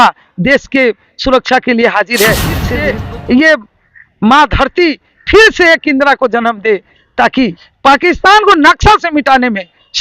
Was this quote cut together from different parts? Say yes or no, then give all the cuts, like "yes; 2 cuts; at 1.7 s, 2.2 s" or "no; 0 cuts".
yes; 2 cuts; at 2.7 s, 7.6 s